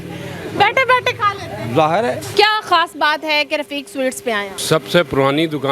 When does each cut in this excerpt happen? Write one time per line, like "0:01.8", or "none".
0:02.3
0:04.5

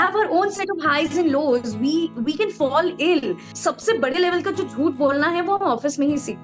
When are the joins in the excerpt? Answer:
0:03.5

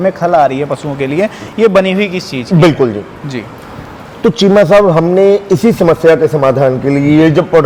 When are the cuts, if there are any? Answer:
none

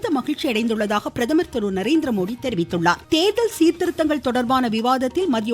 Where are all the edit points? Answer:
0:03.0

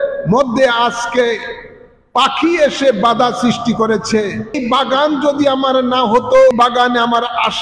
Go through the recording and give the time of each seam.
0:04.6
0:06.5

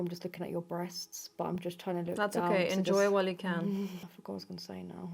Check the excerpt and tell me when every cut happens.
0:04.1

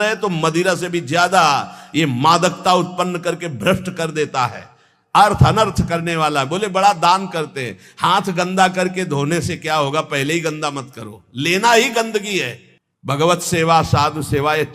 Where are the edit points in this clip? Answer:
none

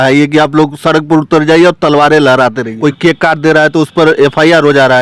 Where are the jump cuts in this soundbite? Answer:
0:02.8

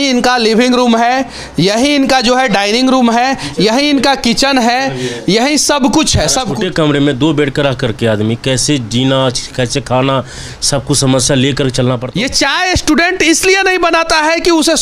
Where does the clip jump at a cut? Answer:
0:06.5
0:12.0

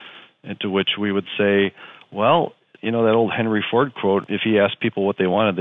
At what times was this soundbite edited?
0:02.7
0:04.2

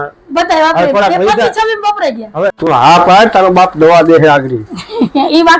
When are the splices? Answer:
0:02.6

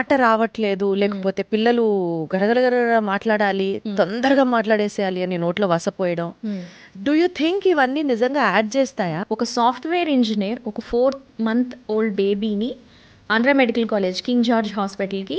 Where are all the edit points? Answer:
0:06.8
0:09.2

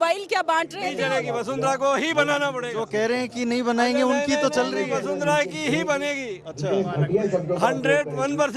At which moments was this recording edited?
0:01.0

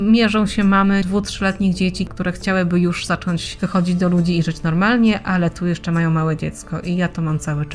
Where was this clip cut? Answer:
0:01.0
0:02.1
0:03.5

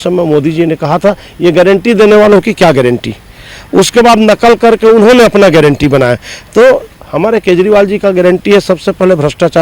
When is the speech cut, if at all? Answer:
none

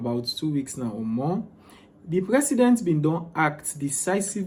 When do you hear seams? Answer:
none

